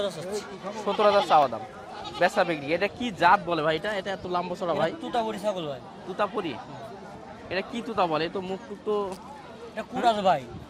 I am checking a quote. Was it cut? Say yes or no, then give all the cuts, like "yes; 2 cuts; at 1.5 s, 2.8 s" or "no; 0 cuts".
no; 0 cuts